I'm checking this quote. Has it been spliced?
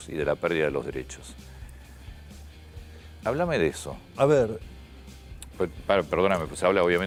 no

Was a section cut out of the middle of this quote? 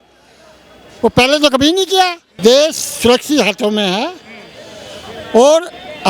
yes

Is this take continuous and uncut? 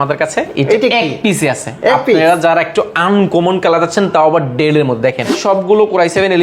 no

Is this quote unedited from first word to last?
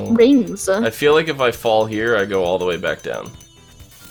yes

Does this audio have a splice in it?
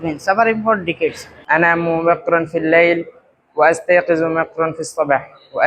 yes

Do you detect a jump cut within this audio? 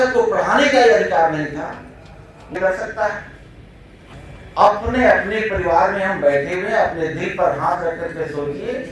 yes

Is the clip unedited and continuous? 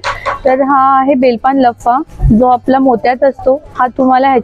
yes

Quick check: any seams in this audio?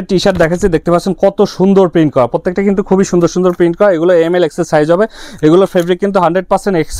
no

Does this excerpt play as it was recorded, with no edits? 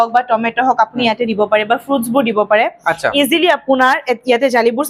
yes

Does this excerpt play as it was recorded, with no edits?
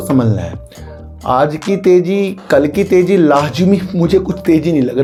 yes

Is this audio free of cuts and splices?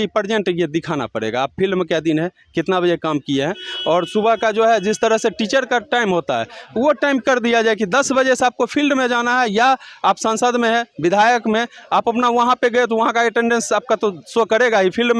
yes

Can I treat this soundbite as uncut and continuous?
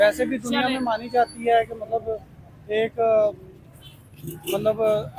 yes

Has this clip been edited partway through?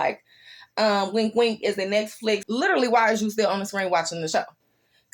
yes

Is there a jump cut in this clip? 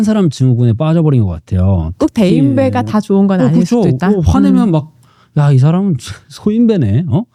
no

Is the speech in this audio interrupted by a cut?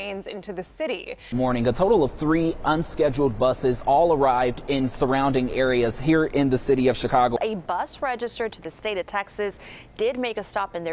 no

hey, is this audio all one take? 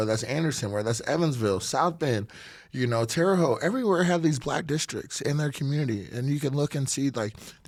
yes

